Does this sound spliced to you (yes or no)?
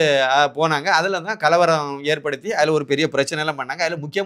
no